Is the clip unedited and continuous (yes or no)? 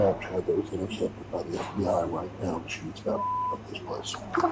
yes